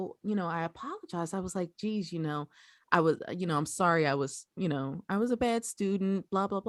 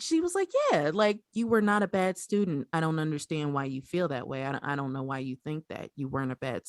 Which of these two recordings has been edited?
second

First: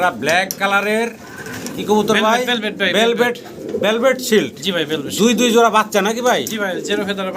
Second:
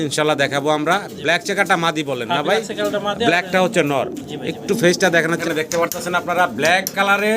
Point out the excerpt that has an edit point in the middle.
second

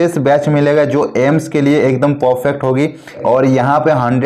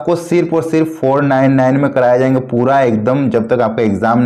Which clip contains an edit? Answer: first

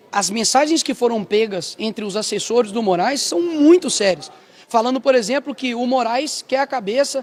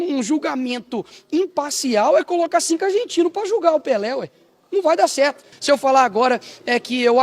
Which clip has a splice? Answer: second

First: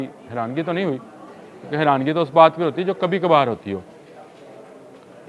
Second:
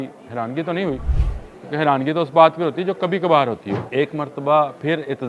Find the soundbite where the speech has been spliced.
second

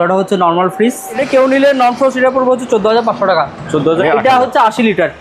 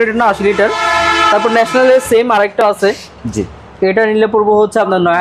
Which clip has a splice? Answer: first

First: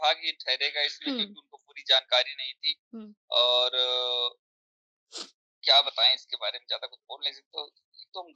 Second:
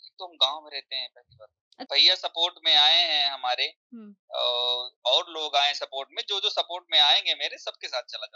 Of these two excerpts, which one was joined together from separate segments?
second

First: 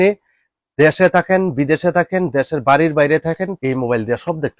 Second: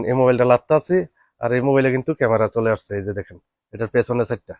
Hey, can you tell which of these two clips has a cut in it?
first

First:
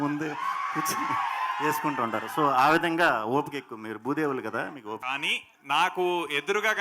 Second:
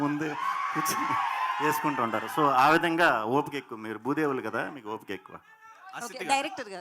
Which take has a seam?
first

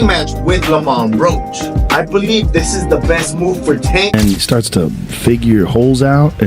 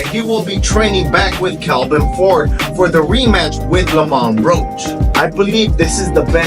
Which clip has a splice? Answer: first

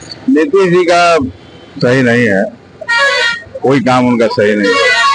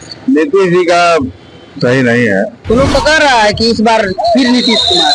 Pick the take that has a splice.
second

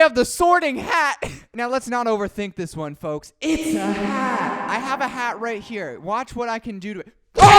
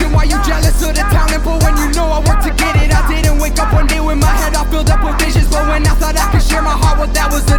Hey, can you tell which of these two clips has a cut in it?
first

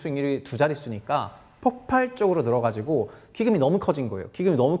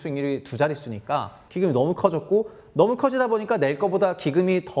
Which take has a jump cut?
second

